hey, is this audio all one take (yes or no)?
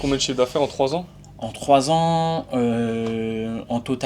yes